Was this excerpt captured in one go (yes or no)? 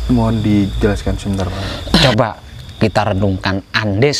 no